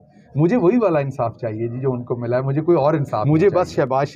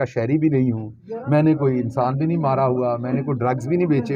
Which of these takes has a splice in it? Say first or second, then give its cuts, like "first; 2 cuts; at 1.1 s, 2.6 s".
first; 1 cut; at 3.2 s